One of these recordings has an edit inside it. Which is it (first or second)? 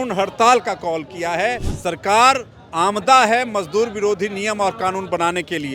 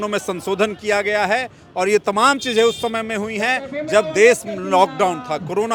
first